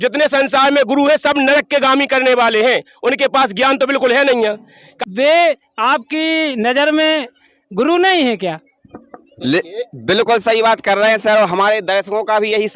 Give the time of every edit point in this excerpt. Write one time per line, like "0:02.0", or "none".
0:04.9